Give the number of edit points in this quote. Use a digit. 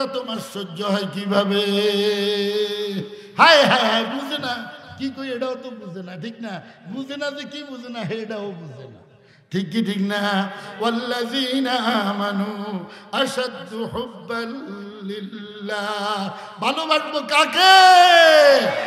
0